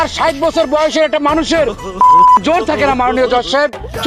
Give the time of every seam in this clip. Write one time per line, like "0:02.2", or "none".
none